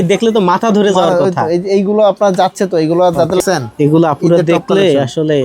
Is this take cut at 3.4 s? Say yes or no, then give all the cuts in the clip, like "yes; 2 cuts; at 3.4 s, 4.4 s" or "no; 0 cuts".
yes; 1 cut; at 3.4 s